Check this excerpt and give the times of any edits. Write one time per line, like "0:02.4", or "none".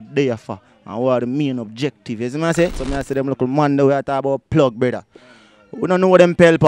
0:02.8

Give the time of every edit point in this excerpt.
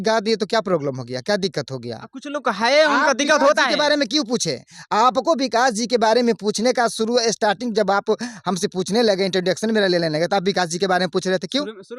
none

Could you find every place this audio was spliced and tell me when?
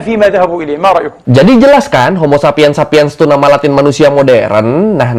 0:01.2

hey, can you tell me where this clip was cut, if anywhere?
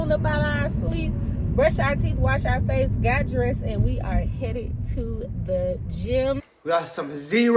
0:06.5

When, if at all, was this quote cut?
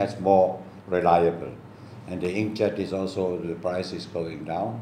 none

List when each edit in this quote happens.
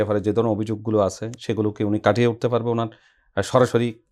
none

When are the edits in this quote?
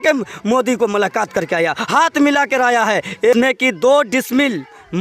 0:03.3

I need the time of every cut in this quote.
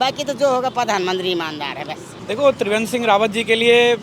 0:02.1

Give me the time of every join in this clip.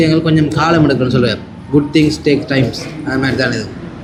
none

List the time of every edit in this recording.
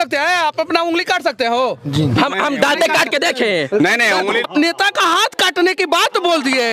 0:04.5

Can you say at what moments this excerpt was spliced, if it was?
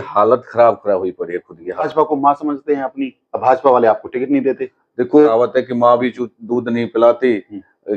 0:01.9
0:05.3

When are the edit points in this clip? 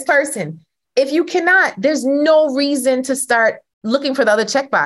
0:03.7

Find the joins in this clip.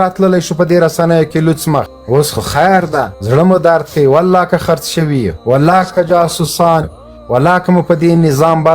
0:02.0
0:03.2
0:05.3

